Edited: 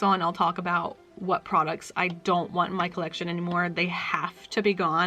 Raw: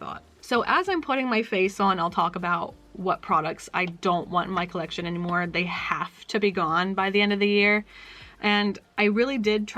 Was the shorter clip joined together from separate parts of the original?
no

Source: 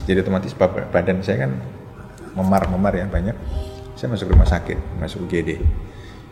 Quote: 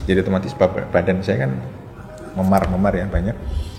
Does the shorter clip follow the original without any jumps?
yes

